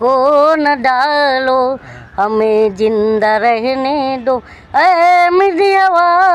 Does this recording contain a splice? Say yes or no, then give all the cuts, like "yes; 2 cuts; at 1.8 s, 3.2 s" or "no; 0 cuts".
no; 0 cuts